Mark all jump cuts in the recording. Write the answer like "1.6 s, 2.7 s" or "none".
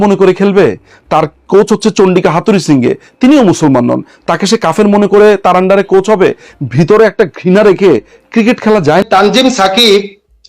9.0 s